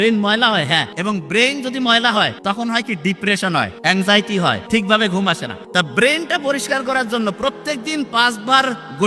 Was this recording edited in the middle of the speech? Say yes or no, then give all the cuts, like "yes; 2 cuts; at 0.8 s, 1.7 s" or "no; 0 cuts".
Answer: yes; 5 cuts; at 0.9 s, 2.4 s, 3.7 s, 4.6 s, 5.5 s